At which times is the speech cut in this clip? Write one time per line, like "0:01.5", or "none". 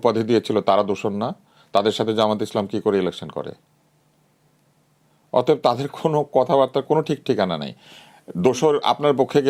none